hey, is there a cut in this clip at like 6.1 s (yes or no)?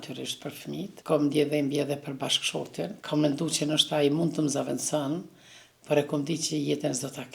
no